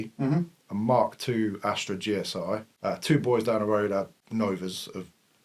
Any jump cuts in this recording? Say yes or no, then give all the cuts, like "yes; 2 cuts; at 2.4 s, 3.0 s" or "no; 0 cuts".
yes; 2 cuts; at 2.7 s, 4.2 s